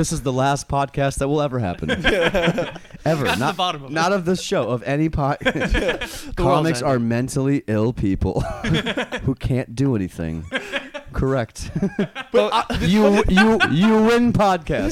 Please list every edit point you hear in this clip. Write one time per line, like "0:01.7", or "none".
none